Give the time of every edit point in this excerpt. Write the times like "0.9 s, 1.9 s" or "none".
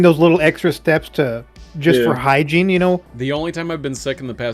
3.1 s